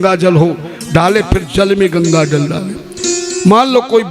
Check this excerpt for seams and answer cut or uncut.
uncut